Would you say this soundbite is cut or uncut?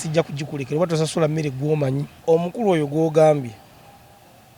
cut